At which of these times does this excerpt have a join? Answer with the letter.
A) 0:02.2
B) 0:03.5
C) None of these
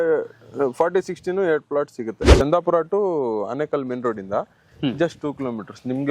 A